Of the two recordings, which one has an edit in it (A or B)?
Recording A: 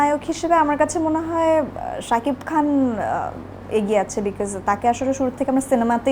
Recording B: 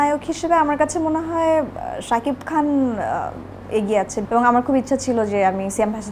B